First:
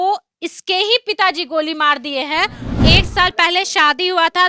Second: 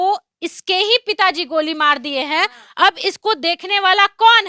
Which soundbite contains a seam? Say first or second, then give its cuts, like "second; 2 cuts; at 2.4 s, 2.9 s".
first; 1 cut; at 2.6 s